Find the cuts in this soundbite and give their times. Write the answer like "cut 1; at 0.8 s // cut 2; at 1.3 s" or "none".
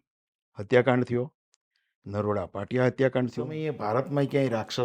cut 1; at 3.7 s